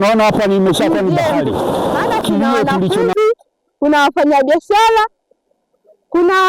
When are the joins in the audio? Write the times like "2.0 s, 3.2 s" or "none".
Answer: 3.0 s